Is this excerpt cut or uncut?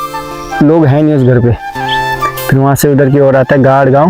uncut